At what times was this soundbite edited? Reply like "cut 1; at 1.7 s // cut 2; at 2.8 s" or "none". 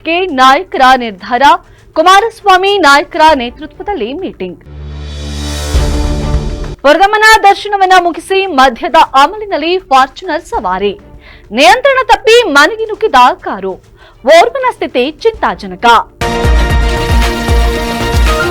cut 1; at 16.1 s